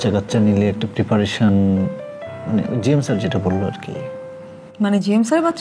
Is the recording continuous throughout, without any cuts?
yes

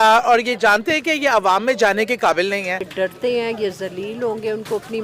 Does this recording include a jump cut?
yes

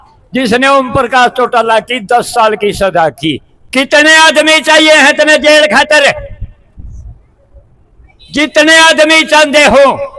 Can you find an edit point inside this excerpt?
yes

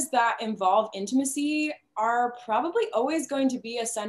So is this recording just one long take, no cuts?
yes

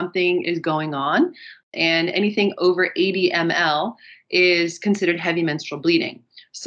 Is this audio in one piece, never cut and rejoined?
yes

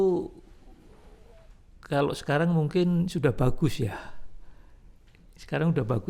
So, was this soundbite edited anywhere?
no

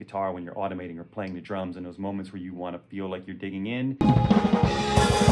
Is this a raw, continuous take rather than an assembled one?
yes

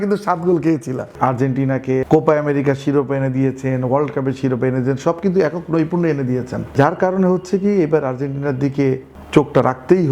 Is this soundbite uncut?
no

